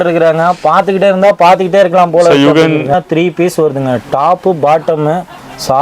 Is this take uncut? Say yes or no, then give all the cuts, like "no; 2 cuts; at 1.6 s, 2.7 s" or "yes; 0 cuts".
no; 1 cut; at 2.9 s